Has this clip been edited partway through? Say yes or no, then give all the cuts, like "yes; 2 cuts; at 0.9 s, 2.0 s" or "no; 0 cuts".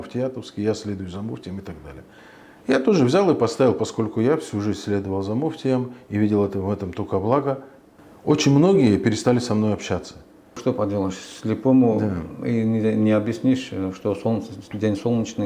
yes; 1 cut; at 10.6 s